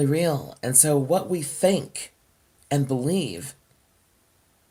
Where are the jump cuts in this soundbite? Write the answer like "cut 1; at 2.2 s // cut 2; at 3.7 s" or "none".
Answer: none